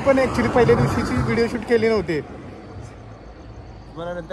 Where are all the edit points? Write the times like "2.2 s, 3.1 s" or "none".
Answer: none